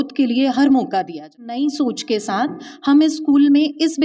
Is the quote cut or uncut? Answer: cut